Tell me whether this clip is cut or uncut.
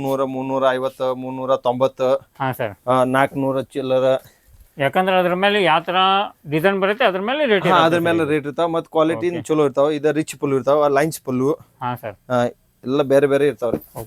uncut